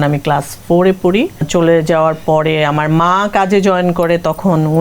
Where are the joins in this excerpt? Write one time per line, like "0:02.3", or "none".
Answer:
0:01.4